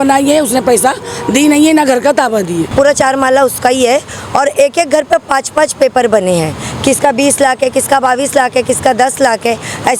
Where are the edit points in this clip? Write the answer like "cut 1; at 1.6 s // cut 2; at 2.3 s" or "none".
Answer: cut 1; at 2.7 s